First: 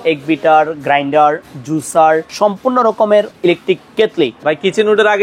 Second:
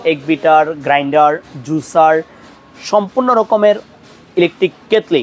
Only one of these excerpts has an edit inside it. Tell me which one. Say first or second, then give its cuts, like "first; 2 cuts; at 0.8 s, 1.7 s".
first; 3 cuts; at 2.3 s, 3.3 s, 4.4 s